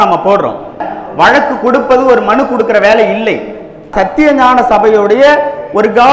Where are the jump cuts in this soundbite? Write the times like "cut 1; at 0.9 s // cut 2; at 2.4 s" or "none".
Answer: cut 1; at 0.9 s // cut 2; at 3.9 s